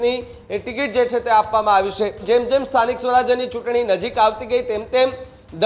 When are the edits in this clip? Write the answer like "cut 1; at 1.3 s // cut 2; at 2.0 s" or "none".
cut 1; at 2.2 s